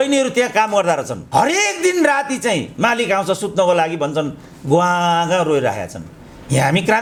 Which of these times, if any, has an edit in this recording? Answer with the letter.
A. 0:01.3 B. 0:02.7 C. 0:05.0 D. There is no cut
D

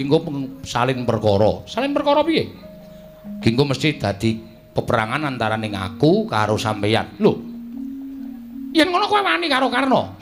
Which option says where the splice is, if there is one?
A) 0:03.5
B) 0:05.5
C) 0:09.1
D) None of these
B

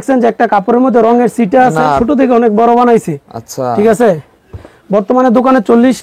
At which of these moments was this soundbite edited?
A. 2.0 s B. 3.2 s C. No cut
A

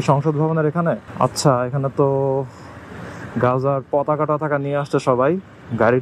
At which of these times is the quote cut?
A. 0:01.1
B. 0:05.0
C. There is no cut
A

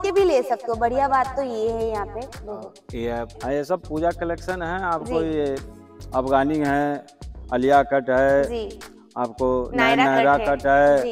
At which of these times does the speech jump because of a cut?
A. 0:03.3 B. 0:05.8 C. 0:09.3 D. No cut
A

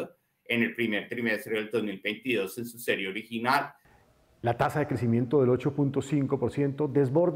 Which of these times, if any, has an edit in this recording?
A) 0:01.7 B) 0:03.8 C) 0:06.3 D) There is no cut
B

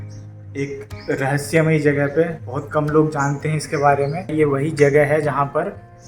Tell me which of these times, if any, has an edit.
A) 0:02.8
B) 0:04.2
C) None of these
B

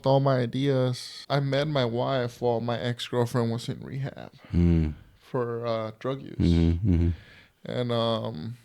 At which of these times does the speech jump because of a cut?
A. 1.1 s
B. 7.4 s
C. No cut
A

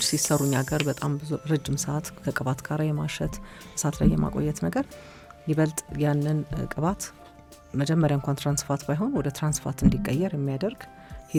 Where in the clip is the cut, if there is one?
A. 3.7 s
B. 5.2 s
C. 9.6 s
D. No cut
D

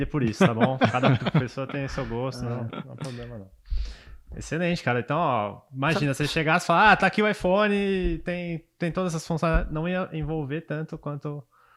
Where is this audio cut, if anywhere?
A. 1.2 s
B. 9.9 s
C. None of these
C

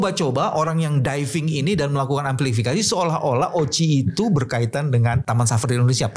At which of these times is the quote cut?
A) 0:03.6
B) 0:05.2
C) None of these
B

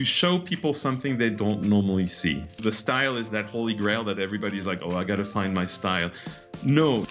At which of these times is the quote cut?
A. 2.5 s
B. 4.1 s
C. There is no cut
A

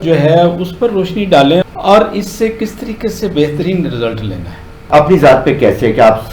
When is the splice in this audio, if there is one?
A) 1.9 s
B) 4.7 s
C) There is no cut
B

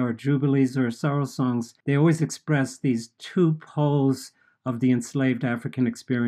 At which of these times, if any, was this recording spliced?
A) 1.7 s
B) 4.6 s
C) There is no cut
A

